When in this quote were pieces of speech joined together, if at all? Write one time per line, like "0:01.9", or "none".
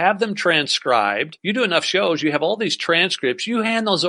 0:01.3